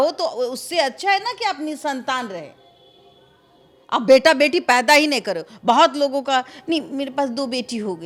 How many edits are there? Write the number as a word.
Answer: zero